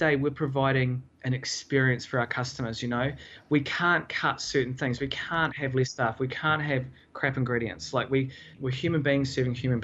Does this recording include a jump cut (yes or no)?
no